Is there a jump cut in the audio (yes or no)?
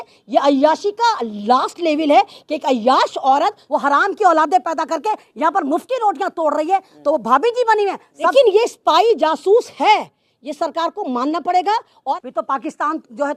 yes